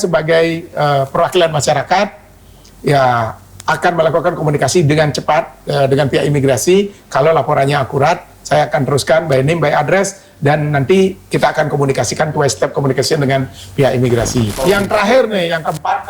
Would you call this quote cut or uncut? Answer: cut